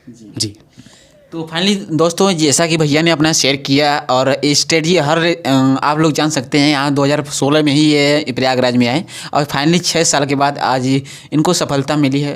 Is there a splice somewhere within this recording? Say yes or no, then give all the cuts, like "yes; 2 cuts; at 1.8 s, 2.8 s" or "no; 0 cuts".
no; 0 cuts